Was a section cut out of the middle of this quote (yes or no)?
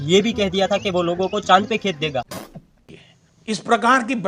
no